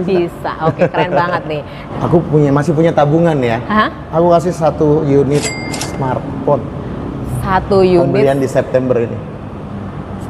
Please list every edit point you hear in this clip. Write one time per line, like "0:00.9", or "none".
0:01.8